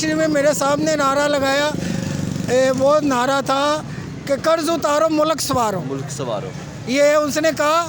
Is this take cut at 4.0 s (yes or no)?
no